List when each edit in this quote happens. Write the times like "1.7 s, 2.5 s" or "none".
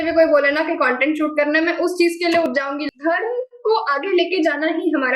2.7 s